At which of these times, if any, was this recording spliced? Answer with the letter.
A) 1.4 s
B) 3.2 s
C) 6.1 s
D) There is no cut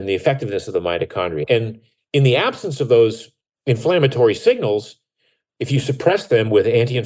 A